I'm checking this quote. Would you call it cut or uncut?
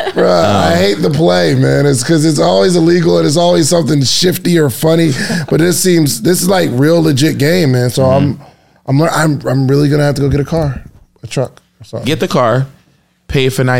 uncut